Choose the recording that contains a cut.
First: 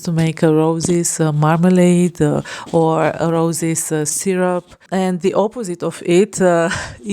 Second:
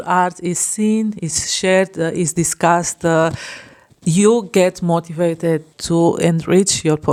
first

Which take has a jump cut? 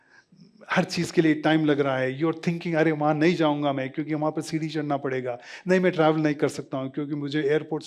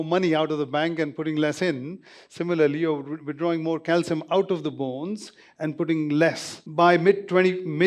second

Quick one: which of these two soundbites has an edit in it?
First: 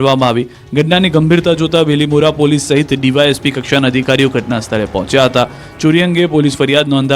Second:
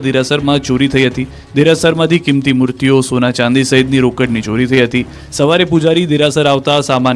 first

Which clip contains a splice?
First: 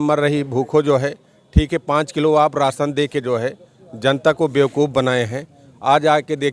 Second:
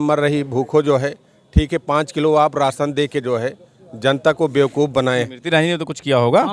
second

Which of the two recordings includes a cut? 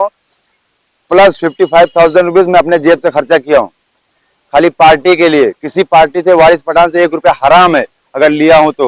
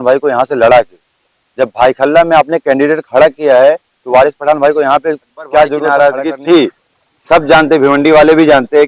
second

